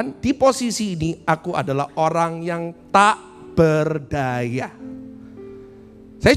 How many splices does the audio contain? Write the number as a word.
zero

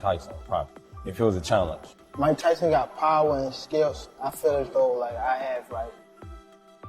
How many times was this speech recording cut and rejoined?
one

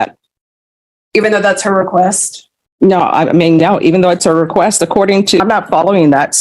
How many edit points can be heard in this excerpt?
one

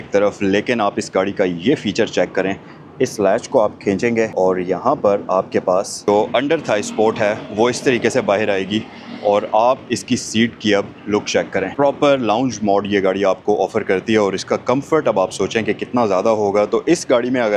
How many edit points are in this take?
zero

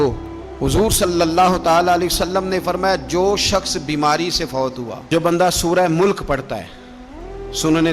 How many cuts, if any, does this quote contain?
one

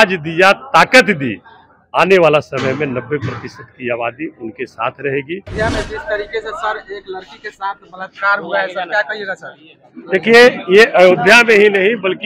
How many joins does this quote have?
one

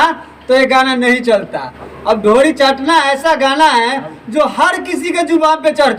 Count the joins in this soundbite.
zero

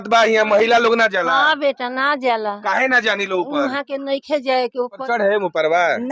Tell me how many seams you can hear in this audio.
one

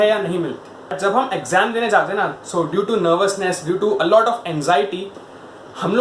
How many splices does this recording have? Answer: one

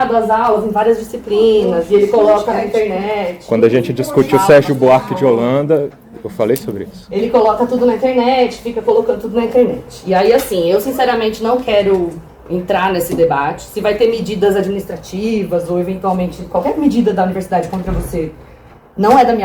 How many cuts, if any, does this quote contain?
zero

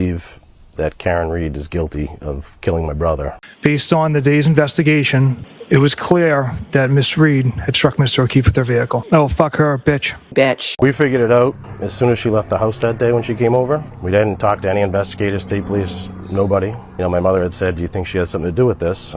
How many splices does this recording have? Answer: two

